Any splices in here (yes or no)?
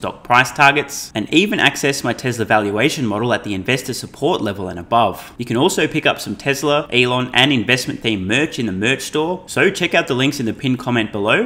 yes